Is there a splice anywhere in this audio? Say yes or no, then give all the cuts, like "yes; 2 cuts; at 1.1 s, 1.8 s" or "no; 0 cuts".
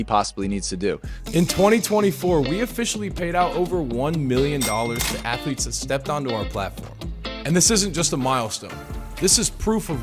yes; 1 cut; at 1.1 s